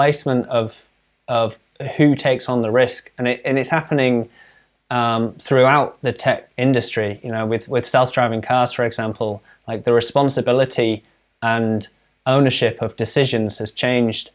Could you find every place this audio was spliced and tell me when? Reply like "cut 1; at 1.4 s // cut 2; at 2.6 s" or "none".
none